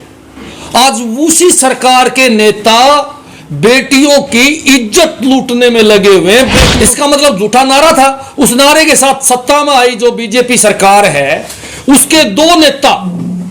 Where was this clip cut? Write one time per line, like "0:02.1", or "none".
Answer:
0:06.5